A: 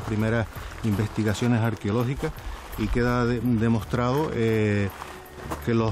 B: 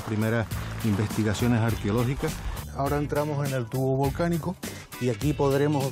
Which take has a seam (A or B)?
B